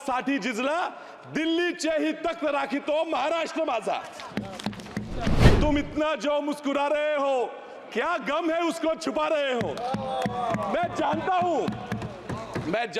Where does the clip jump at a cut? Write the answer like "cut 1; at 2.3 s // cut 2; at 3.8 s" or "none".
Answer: cut 1; at 5.5 s